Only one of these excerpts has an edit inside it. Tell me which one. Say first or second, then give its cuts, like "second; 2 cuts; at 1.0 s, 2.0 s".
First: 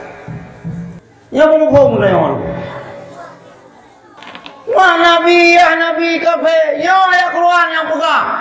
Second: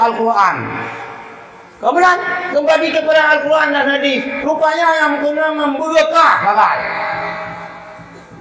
first; 2 cuts; at 1.0 s, 4.1 s